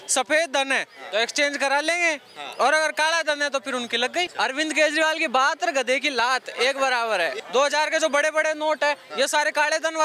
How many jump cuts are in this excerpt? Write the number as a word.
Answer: two